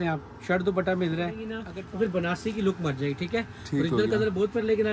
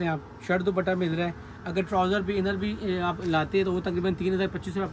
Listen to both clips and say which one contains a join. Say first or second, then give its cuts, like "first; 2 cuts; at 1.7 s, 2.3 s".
first; 1 cut; at 1.6 s